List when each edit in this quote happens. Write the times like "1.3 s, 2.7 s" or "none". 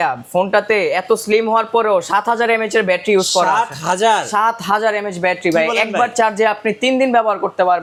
none